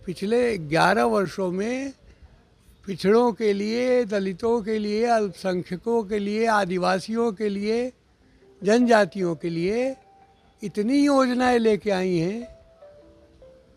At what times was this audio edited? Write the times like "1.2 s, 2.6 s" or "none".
none